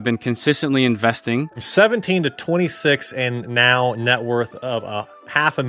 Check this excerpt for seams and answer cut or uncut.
cut